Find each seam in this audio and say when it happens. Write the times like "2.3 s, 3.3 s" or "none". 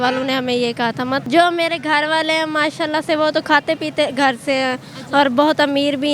1.2 s